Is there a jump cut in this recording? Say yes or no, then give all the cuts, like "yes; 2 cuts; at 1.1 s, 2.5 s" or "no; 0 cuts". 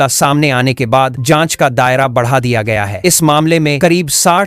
no; 0 cuts